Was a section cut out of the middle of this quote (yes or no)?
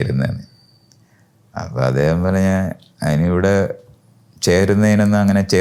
no